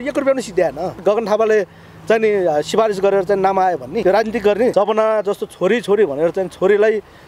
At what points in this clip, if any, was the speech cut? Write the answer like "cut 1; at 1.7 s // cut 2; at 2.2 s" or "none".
cut 1; at 1.0 s // cut 2; at 4.0 s // cut 3; at 4.7 s